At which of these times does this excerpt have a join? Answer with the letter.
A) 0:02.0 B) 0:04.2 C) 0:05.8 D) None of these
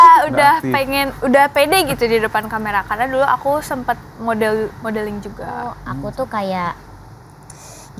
C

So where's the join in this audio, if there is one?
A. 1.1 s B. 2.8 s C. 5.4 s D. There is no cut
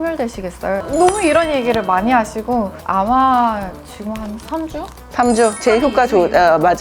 B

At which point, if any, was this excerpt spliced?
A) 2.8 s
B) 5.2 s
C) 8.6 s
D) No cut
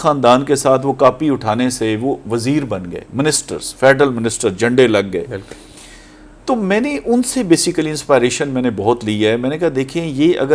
D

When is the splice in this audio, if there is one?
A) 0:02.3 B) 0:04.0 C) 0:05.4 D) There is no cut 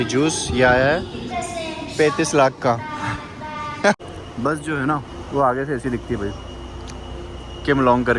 B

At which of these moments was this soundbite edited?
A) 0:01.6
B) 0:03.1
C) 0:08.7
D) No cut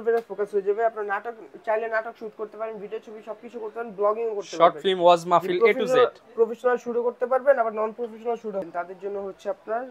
C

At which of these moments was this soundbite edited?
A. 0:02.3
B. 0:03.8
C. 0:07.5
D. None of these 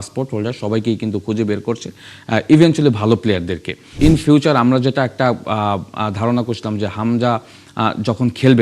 B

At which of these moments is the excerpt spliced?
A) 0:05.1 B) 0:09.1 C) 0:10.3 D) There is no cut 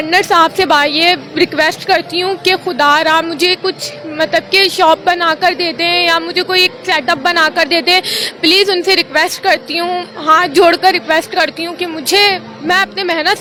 D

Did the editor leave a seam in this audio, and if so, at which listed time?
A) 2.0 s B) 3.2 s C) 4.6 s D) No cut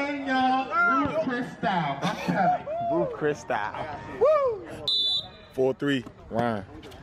D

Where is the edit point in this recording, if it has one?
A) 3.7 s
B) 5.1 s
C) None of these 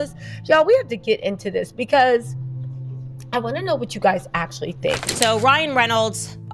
B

